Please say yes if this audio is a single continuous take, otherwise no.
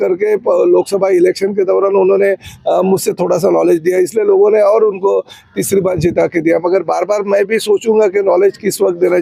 yes